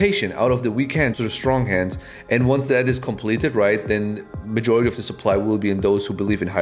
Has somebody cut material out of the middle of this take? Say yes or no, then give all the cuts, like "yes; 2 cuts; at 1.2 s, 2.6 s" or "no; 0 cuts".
yes; 1 cut; at 1.1 s